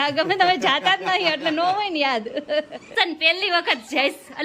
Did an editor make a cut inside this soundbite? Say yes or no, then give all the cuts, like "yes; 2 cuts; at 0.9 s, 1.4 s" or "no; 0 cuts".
yes; 1 cut; at 2.9 s